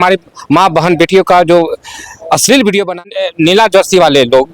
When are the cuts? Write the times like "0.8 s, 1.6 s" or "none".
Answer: 3.2 s